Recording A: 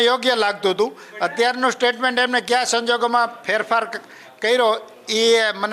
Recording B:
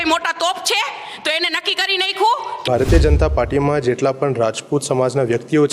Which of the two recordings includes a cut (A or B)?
B